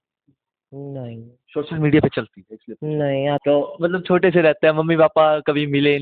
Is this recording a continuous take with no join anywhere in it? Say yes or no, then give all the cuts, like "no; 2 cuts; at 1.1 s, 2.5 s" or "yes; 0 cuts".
no; 1 cut; at 3.4 s